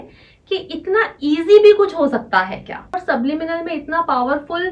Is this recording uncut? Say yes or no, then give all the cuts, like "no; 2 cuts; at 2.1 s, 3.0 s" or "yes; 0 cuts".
no; 1 cut; at 3.0 s